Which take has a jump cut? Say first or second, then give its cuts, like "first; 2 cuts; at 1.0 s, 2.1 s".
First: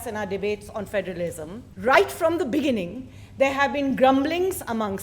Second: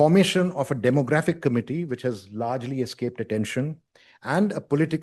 first; 1 cut; at 1.6 s